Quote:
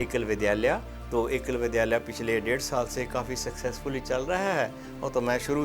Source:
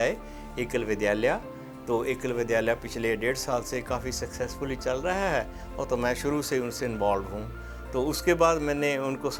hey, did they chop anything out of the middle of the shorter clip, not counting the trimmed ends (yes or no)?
yes